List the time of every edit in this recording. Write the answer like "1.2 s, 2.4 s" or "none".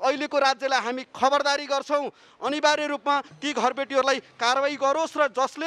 none